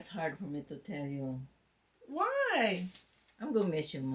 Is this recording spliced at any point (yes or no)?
no